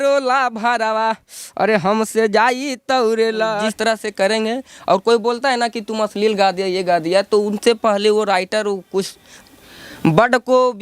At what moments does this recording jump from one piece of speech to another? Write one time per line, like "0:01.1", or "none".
0:03.7